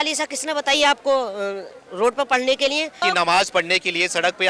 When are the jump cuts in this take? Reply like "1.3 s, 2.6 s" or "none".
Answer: 3.0 s

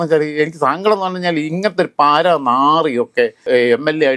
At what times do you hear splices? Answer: none

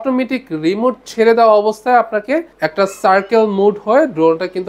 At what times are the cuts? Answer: none

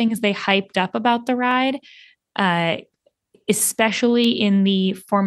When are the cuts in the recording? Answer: none

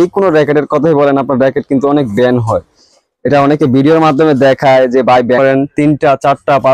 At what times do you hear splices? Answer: 5.4 s

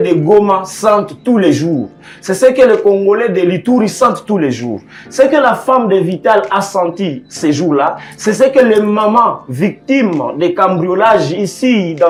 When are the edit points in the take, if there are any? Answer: none

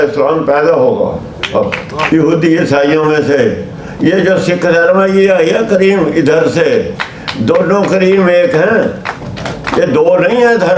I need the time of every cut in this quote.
2.1 s

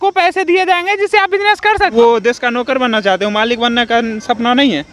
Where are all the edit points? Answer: 1.9 s

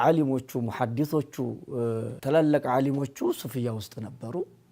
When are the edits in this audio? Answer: 2.1 s

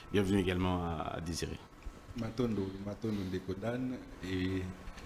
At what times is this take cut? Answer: none

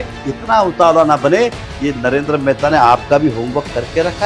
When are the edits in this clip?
none

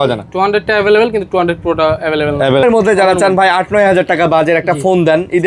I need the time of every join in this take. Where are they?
2.6 s

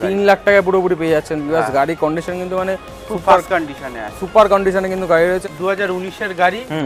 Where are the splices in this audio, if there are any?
5.4 s

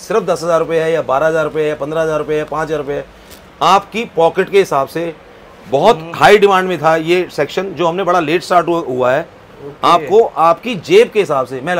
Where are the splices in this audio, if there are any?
none

